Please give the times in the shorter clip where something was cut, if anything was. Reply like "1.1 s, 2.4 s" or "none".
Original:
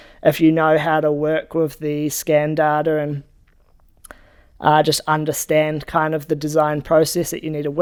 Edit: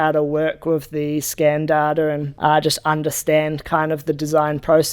2.3 s